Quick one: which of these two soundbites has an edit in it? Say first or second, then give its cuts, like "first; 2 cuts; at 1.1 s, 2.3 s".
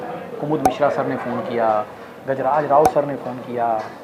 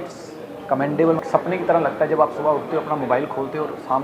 second; 1 cut; at 1.2 s